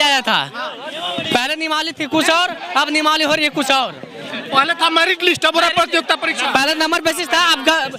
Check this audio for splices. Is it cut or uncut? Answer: uncut